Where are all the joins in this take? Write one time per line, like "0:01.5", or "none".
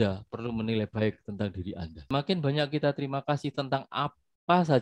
0:02.1